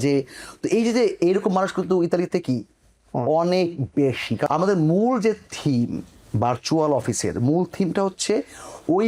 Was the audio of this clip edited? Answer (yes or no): yes